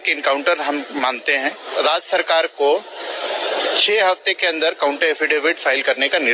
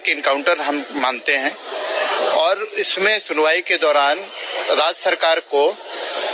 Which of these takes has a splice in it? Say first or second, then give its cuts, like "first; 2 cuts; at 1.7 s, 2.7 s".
first; 1 cut; at 1.6 s